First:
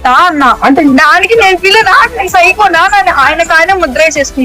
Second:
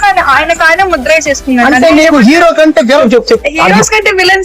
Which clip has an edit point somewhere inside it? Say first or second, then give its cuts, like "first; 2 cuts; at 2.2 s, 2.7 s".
second; 1 cut; at 3.0 s